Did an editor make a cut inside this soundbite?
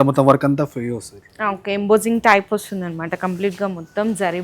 no; 0 cuts

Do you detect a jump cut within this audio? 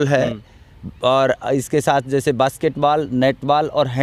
no; 0 cuts

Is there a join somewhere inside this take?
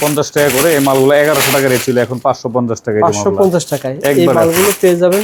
no; 0 cuts

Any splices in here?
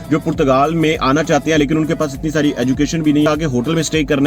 yes; 1 cut; at 3.3 s

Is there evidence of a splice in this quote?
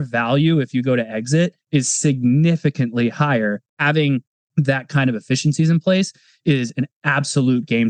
yes; 1 cut; at 3.6 s

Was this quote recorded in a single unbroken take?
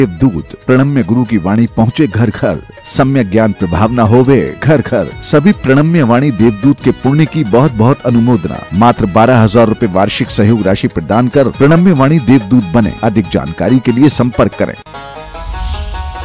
no; 1 cut; at 14.8 s

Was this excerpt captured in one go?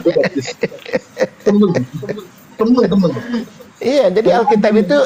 yes; 0 cuts

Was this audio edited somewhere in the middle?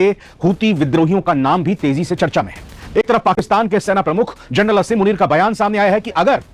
no; 0 cuts

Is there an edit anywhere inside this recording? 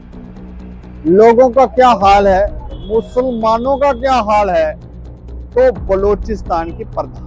no; 0 cuts

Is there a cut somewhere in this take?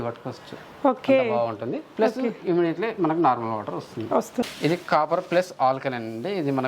yes; 1 cut; at 4.4 s

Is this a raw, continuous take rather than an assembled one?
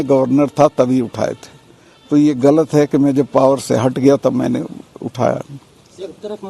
yes; 0 cuts

